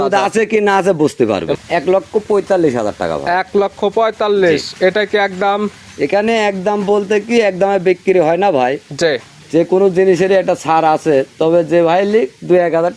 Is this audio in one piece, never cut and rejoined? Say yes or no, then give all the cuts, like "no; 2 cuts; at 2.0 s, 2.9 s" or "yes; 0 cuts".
no; 1 cut; at 1.5 s